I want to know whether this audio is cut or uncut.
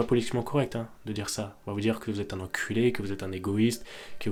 uncut